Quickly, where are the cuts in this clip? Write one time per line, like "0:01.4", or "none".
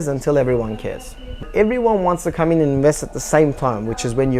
0:01.5